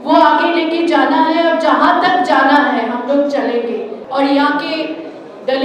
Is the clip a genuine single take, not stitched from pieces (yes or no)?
no